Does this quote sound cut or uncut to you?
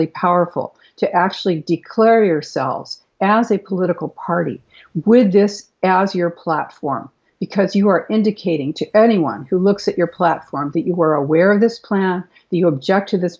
uncut